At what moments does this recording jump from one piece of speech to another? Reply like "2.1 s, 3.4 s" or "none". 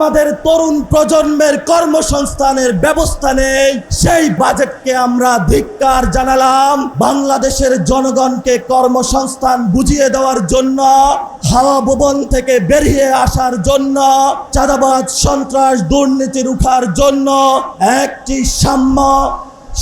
4.4 s, 6.9 s, 11.3 s, 14.5 s, 17.7 s